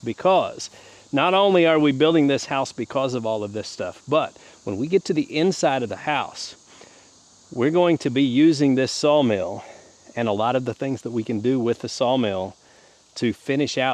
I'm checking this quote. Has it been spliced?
no; 0 cuts

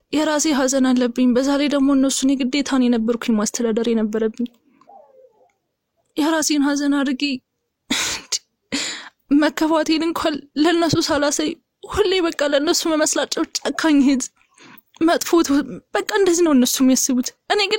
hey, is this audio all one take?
yes; 0 cuts

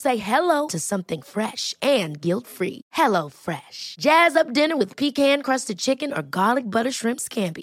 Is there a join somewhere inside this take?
no; 0 cuts

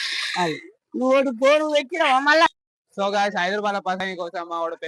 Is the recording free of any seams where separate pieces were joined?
no; 2 cuts; at 2.5 s, 4.0 s

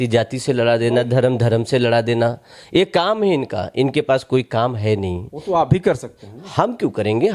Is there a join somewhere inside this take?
no; 0 cuts

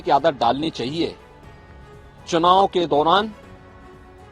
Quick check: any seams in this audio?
yes; 1 cut; at 3.3 s

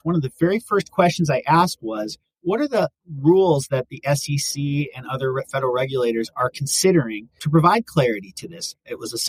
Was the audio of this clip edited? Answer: no; 0 cuts

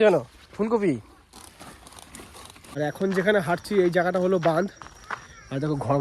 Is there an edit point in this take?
yes; 1 cut; at 2.6 s

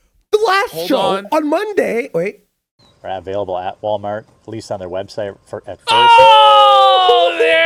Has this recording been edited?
no; 0 cuts

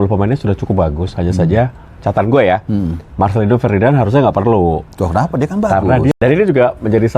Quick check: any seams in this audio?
yes; 1 cut; at 6.1 s

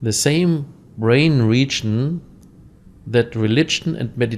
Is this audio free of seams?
yes; 0 cuts

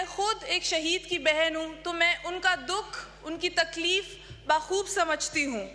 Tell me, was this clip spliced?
no; 0 cuts

